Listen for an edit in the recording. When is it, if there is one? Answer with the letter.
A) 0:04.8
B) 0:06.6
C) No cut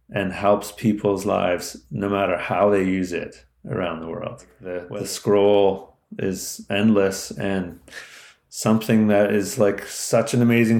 A